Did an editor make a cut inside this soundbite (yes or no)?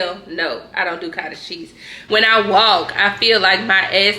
yes